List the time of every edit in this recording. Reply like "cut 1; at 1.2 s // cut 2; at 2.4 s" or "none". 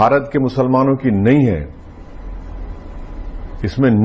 none